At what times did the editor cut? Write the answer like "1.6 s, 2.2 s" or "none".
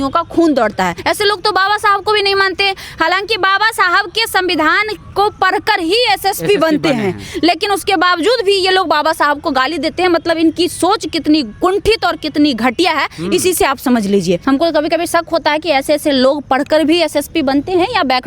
1.0 s, 14.4 s